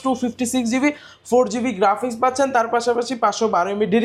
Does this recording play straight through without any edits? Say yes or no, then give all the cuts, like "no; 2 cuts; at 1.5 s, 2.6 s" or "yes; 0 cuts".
yes; 0 cuts